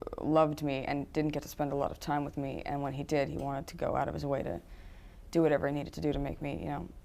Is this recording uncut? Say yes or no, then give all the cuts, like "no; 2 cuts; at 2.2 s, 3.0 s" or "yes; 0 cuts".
no; 1 cut; at 5.4 s